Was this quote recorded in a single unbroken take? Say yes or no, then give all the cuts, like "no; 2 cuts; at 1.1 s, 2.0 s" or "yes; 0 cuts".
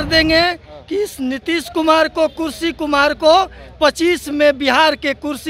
yes; 0 cuts